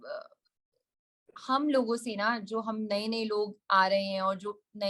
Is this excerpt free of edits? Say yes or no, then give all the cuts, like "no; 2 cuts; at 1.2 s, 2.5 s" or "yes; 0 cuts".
yes; 0 cuts